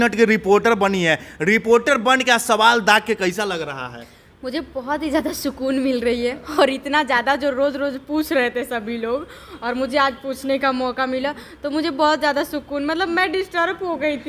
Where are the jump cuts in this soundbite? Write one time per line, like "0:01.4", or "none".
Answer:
none